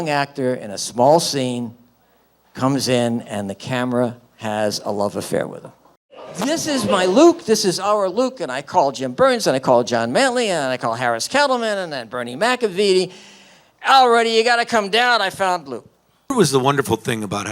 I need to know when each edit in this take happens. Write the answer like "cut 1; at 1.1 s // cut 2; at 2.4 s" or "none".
cut 1; at 6.2 s // cut 2; at 16.3 s